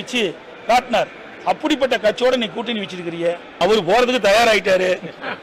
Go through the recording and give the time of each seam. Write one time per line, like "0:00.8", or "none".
0:03.6